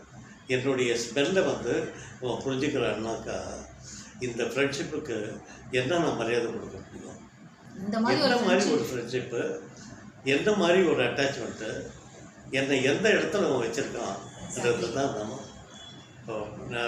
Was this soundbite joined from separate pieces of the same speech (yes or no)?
no